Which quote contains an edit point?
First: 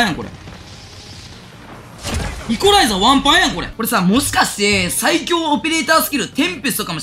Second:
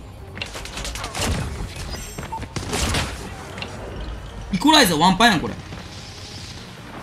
first; 1 cut; at 3.7 s

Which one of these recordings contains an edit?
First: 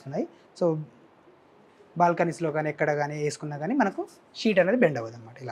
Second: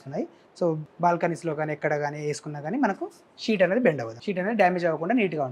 second; 2 cuts; at 0.9 s, 4.1 s

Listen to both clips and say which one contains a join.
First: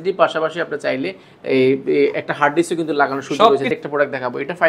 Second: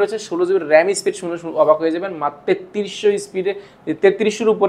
first; 1 cut; at 3.7 s

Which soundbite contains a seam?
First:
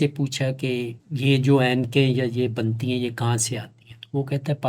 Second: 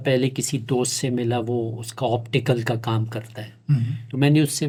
first; 1 cut; at 1.0 s

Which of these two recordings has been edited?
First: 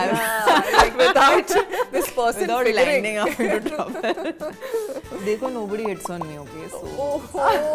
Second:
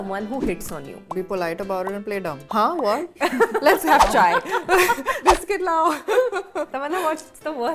second; 5 cuts; at 1.1 s, 2.4 s, 3.1 s, 5.2 s, 7.0 s

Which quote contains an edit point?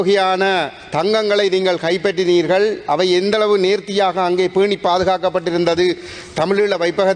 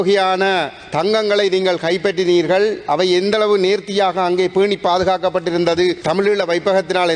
second; 1 cut; at 6.0 s

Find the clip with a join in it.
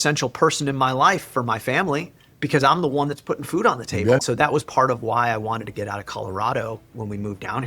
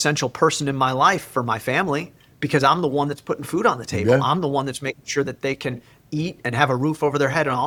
first; 1 cut; at 4.2 s

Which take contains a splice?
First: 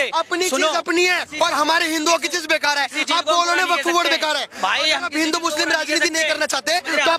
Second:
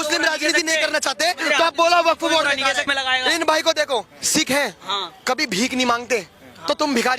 second; 1 cut; at 2.9 s

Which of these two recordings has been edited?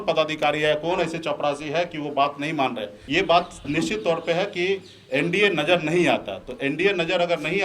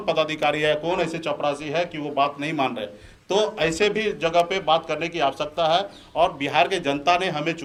first; 1 cut; at 2.9 s

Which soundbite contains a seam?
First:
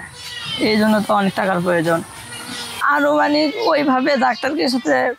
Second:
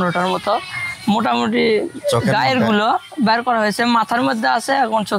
first; 1 cut; at 2.8 s

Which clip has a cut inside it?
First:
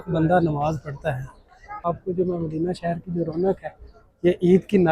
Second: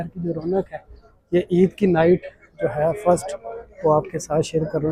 first; 1 cut; at 1.9 s

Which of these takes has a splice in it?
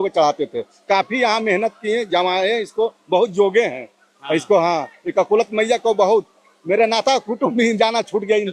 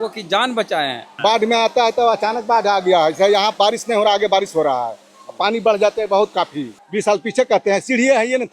second; 2 cuts; at 1.0 s, 6.7 s

